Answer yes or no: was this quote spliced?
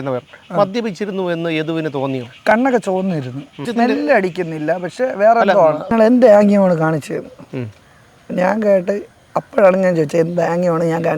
yes